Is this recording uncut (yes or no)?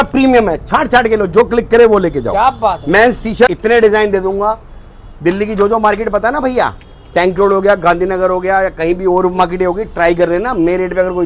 no